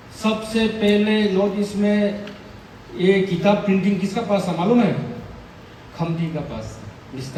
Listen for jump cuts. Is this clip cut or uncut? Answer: uncut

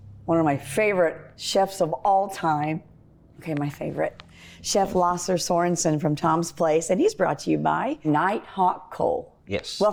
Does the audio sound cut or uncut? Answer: uncut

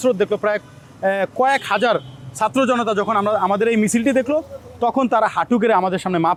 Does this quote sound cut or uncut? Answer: uncut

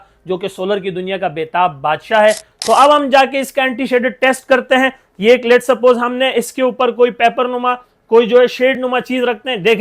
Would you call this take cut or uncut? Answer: cut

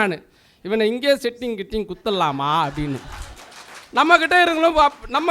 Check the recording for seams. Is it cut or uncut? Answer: uncut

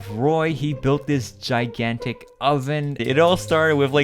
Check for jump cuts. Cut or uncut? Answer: cut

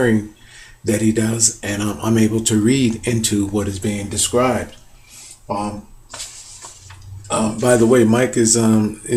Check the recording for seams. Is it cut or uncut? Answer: uncut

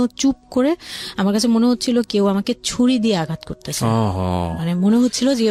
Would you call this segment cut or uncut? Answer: uncut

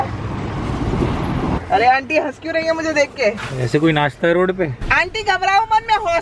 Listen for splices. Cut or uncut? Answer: cut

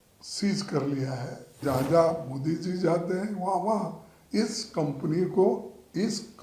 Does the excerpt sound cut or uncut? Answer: cut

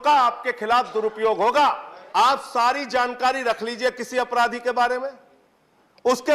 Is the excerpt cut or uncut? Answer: cut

